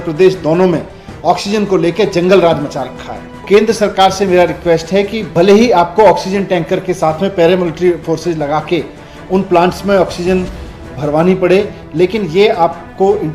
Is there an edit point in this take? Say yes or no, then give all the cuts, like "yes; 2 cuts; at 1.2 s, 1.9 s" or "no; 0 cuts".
yes; 1 cut; at 3.4 s